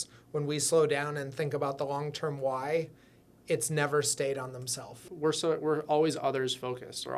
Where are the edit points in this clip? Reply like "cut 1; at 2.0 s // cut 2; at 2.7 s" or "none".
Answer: cut 1; at 4.9 s